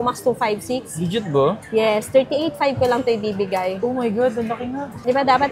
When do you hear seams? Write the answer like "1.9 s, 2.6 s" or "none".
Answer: none